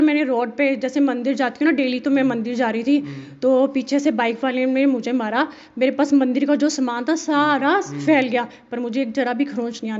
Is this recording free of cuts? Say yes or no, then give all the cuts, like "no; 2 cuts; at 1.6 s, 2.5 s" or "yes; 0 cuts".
yes; 0 cuts